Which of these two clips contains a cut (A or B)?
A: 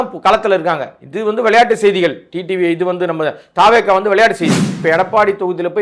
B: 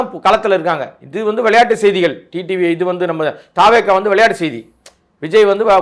A